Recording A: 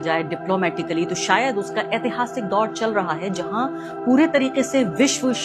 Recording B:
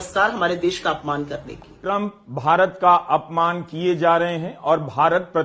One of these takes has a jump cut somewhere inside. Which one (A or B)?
B